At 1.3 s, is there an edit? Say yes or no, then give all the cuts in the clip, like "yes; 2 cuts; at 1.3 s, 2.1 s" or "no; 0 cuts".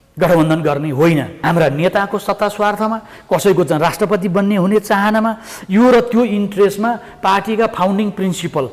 yes; 1 cut; at 1.3 s